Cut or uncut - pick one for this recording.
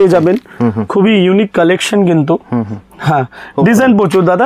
uncut